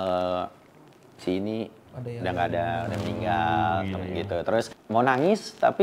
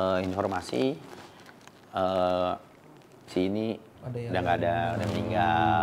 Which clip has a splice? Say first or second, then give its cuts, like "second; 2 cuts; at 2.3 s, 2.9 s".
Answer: first; 1 cut; at 4.8 s